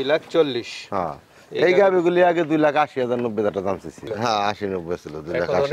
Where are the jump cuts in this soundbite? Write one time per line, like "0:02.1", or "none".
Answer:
none